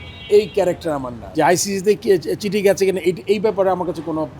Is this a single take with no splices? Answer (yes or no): no